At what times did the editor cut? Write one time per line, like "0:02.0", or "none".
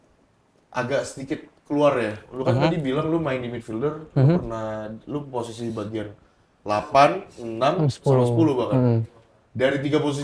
none